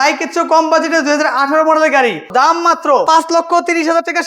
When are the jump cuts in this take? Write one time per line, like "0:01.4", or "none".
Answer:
0:02.3